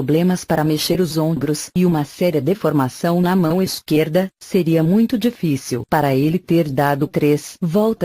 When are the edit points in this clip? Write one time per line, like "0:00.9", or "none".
0:04.9